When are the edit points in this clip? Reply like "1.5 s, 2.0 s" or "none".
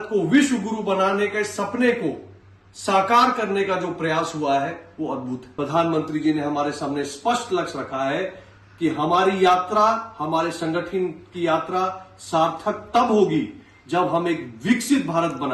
5.4 s